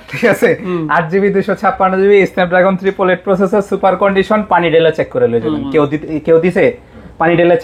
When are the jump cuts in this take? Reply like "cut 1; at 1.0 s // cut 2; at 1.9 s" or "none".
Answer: none